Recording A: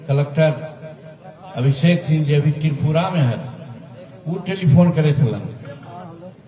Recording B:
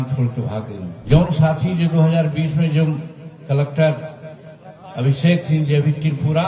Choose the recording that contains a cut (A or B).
B